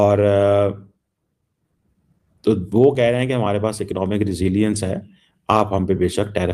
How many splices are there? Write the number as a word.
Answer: zero